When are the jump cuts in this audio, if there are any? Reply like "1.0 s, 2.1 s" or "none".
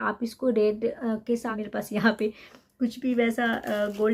1.4 s